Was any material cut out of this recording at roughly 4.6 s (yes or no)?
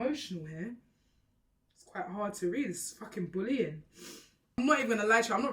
yes